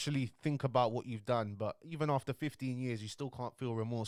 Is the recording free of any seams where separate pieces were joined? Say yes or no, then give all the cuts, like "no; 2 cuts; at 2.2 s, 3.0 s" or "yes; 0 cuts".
yes; 0 cuts